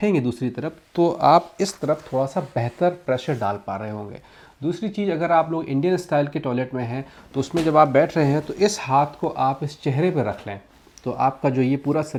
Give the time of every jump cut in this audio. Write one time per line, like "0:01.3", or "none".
none